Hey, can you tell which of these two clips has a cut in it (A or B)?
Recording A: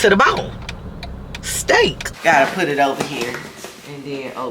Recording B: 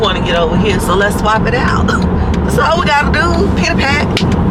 A